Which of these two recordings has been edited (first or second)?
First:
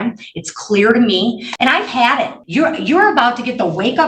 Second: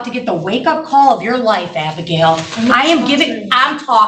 first